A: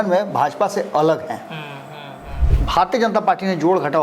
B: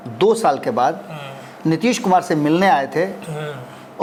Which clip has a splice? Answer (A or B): A